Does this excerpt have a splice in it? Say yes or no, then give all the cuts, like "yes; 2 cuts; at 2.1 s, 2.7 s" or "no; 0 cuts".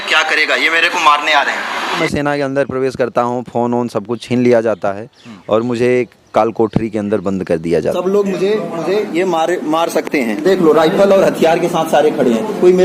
yes; 2 cuts; at 2.0 s, 7.9 s